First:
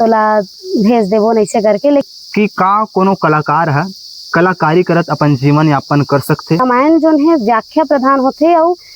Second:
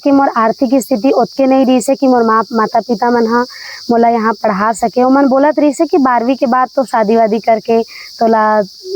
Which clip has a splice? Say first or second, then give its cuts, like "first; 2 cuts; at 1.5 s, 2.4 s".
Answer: first; 2 cuts; at 2.1 s, 6.6 s